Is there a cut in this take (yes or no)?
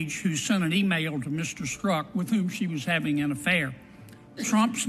no